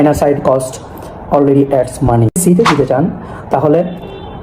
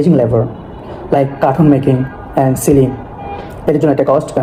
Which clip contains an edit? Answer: first; 1 cut; at 2.4 s

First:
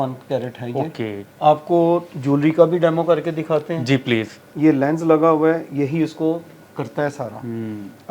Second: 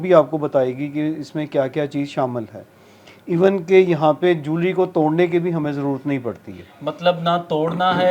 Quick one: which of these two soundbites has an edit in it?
first; 2 cuts; at 1.2 s, 4.4 s

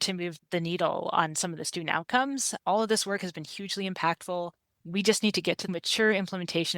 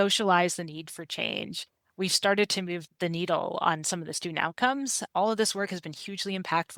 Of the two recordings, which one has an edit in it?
first; 1 cut; at 5.7 s

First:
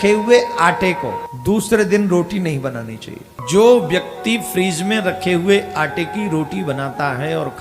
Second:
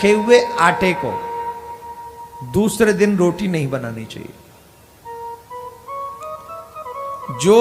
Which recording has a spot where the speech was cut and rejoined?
first; 2 cuts; at 1.3 s, 3.3 s

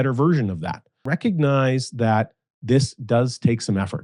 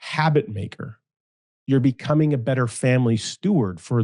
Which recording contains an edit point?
first; 1 cut; at 1.0 s

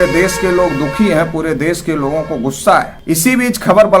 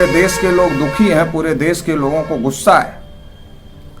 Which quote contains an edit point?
first; 1 cut; at 2.9 s

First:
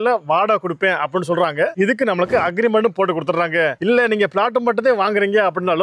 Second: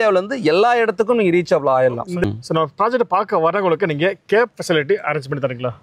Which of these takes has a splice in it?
second; 1 cut; at 2.1 s

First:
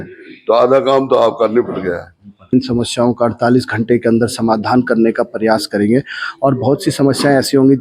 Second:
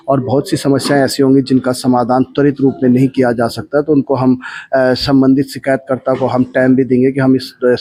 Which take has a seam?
first; 1 cut; at 2.5 s

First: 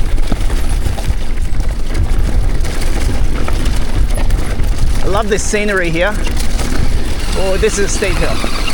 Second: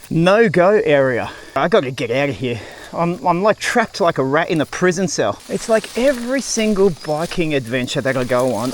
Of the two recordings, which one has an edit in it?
second; 2 cuts; at 1.6 s, 5.4 s

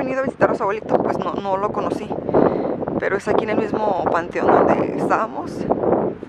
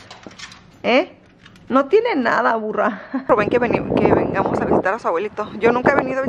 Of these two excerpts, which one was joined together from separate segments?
second; 1 cut; at 3.3 s

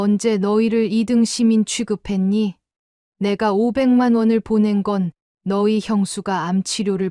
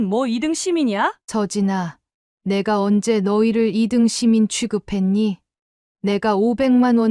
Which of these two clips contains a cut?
second; 1 cut; at 1.2 s

